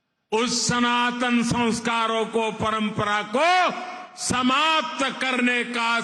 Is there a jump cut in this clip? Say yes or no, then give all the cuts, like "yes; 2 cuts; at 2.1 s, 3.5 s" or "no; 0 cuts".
no; 0 cuts